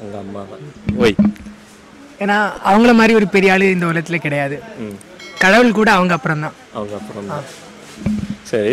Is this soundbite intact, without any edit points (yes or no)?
yes